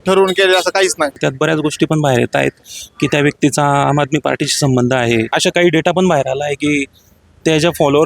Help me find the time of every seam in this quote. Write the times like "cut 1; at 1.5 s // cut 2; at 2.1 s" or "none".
cut 1; at 1.2 s // cut 2; at 5.3 s